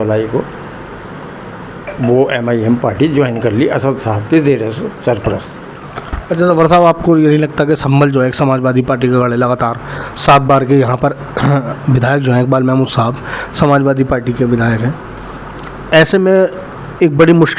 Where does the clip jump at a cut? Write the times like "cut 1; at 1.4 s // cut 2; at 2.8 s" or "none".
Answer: none